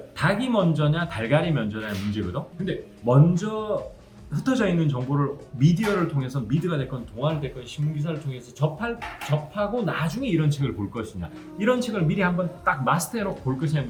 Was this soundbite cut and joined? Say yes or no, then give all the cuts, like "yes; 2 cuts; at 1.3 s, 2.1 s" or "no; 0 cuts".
no; 0 cuts